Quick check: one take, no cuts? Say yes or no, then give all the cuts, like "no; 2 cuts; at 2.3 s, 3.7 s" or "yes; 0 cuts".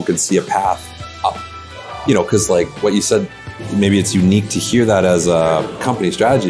yes; 0 cuts